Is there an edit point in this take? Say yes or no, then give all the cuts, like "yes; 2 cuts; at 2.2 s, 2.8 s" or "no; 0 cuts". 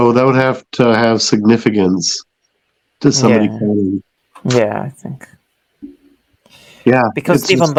no; 0 cuts